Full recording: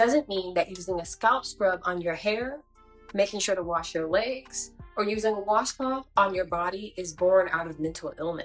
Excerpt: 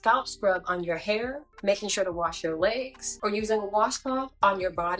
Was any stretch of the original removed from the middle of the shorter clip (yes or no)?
yes